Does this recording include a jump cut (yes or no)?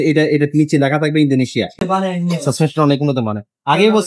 yes